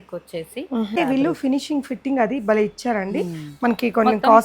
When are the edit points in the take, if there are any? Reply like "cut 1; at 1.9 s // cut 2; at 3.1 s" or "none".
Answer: cut 1; at 1.0 s